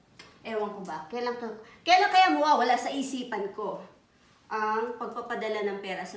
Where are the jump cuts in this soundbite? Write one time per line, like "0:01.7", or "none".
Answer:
none

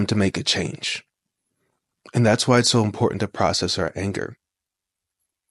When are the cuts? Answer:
none

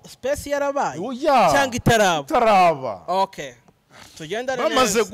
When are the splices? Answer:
none

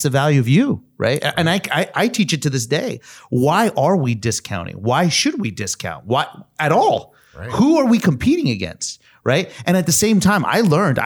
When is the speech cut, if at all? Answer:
none

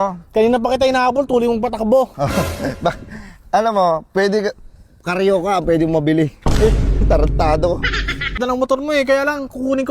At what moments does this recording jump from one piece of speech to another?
0:08.3

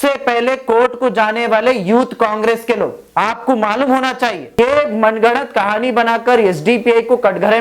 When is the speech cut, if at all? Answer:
0:04.5

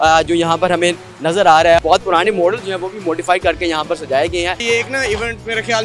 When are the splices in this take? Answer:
0:04.6

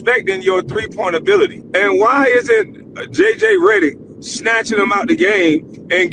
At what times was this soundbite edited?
0:01.6

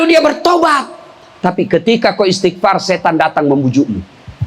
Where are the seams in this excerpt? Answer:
0:01.3

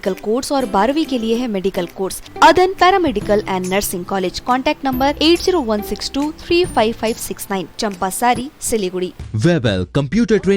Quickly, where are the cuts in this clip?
0:02.2
0:09.2

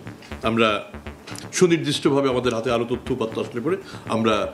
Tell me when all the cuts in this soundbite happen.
none

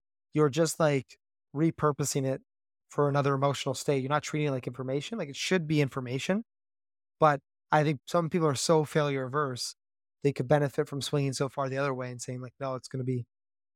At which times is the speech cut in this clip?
0:08.0

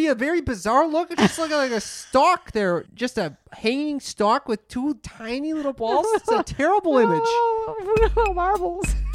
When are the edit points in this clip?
0:02.9

